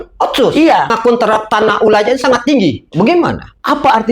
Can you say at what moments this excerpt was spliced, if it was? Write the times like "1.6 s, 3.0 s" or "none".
1.0 s